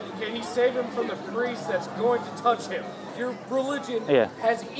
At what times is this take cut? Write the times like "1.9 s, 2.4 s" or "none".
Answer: 3.2 s